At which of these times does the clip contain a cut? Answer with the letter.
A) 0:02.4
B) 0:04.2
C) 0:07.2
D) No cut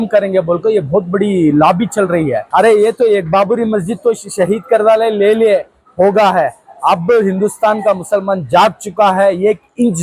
A